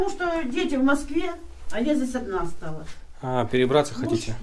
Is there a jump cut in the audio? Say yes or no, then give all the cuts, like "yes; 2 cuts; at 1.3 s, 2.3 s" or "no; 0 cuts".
no; 0 cuts